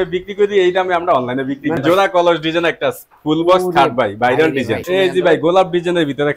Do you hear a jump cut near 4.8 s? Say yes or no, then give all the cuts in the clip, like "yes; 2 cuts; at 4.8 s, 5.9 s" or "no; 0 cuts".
yes; 2 cuts; at 1.8 s, 4.8 s